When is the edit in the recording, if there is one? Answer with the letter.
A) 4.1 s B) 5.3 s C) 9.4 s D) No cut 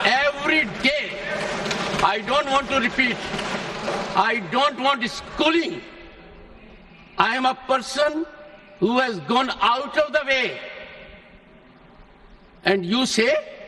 A